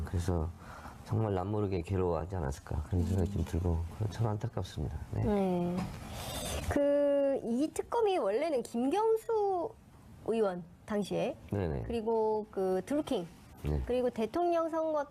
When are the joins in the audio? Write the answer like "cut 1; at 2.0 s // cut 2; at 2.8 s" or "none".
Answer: none